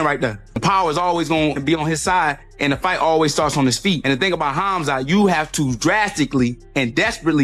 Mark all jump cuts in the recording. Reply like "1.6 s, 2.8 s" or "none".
none